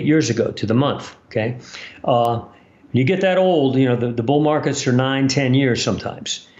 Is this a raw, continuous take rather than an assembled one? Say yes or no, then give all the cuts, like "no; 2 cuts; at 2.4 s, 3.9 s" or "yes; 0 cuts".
yes; 0 cuts